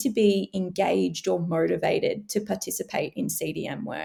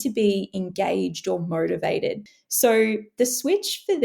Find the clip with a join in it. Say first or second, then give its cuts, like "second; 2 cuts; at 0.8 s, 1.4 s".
second; 1 cut; at 2.2 s